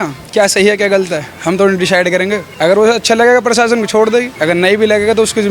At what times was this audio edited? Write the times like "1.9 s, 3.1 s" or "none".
2.5 s, 4.3 s